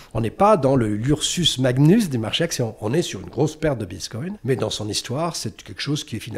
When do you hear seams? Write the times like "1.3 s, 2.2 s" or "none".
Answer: 4.4 s